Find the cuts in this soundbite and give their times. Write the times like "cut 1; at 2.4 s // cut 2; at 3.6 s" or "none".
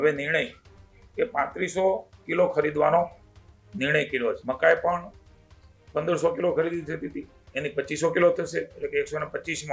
cut 1; at 4.4 s